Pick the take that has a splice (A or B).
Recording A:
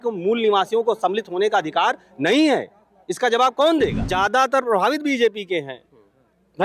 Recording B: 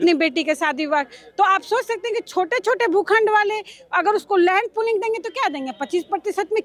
A